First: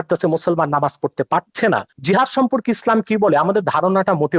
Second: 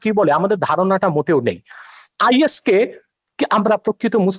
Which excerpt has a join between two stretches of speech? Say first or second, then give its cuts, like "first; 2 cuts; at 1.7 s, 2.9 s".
first; 1 cut; at 1.9 s